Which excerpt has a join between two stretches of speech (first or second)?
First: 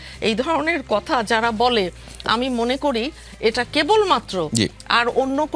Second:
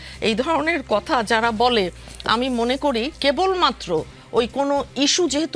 second